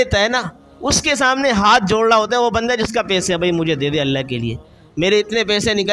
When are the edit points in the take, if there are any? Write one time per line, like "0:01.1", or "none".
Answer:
none